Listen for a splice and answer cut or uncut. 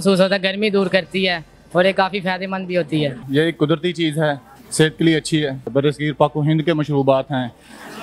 cut